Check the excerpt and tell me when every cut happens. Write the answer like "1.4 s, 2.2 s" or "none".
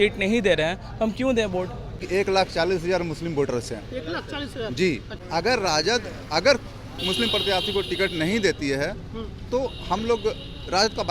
2.0 s, 5.1 s